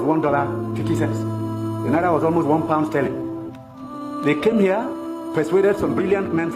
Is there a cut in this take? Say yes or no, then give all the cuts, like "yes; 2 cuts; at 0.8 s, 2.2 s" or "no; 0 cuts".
no; 0 cuts